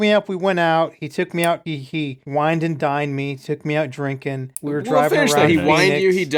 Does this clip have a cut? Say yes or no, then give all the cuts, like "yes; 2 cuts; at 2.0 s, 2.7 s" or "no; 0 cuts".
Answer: no; 0 cuts